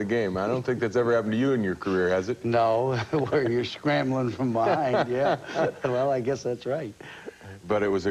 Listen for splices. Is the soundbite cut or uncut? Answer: cut